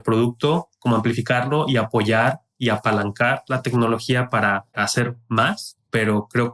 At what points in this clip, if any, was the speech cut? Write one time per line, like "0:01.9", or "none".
0:04.8